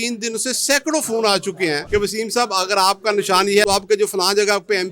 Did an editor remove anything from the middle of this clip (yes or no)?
yes